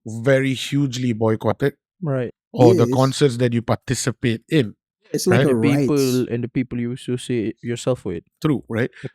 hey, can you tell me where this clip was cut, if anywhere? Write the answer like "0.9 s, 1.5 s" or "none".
2.3 s